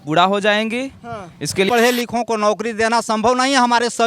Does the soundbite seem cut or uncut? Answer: cut